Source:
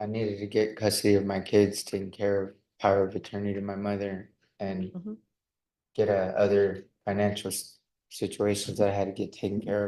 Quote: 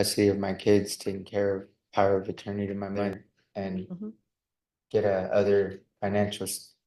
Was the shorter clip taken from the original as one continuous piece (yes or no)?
no